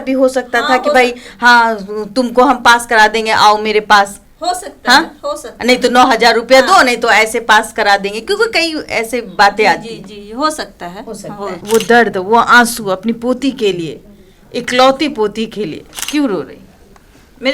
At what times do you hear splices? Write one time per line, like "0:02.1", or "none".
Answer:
0:11.6
0:15.8